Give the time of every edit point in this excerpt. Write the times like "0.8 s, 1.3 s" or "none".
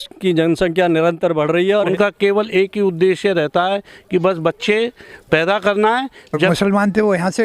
1.9 s, 6.3 s